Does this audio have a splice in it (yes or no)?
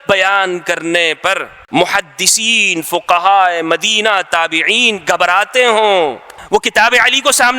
yes